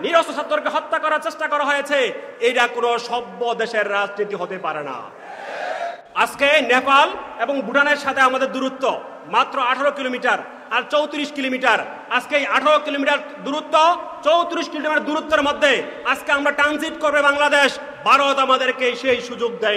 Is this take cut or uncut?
cut